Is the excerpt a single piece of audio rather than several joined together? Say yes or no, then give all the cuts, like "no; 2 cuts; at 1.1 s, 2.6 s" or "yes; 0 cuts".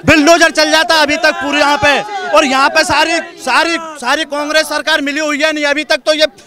yes; 0 cuts